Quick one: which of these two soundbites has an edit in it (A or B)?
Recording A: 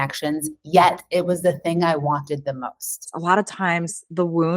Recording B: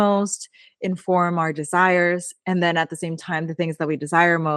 A